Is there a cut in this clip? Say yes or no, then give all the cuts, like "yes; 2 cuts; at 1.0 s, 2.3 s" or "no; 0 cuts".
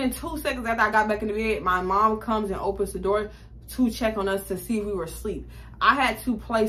no; 0 cuts